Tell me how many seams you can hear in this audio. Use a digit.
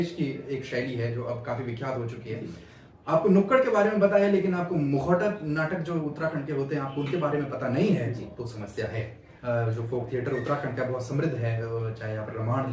1